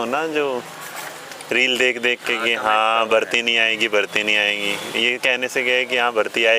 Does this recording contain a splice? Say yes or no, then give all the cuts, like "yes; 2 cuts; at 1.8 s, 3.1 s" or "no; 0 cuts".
no; 0 cuts